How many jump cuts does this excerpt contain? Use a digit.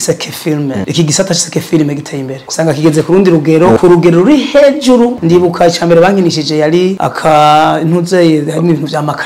5